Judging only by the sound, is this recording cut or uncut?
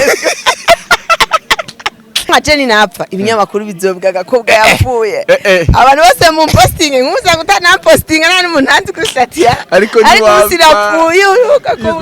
cut